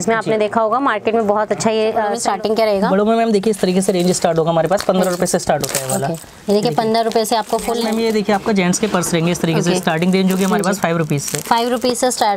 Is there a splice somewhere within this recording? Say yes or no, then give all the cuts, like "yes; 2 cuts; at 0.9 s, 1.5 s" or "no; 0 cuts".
yes; 2 cuts; at 2.2 s, 7.9 s